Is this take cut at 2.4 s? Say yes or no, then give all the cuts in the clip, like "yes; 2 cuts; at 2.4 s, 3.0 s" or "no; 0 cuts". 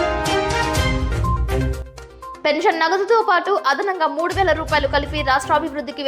yes; 1 cut; at 2.4 s